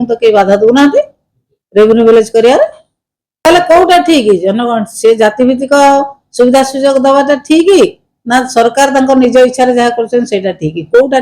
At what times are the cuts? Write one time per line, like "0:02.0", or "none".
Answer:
0:03.4